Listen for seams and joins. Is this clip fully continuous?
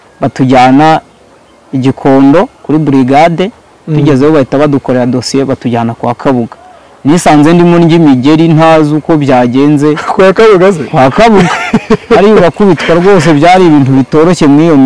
yes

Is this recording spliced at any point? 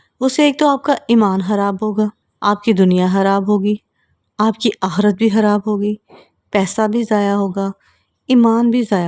yes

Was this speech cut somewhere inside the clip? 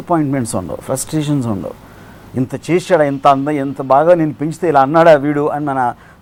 no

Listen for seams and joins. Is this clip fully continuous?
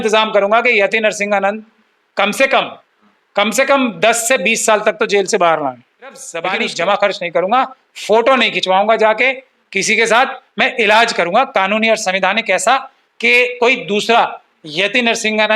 no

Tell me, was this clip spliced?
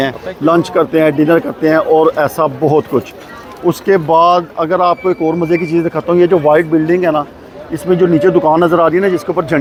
no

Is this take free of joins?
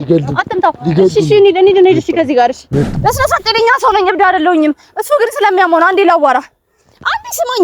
no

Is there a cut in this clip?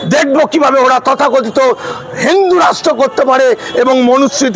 no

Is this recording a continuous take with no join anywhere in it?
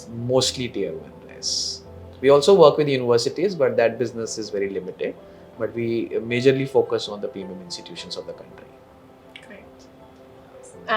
yes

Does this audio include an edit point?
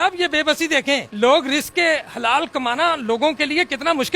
yes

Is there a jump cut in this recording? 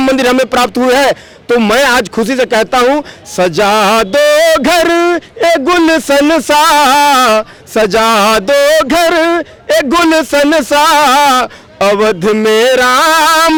no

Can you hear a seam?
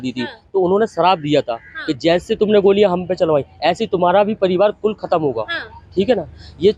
no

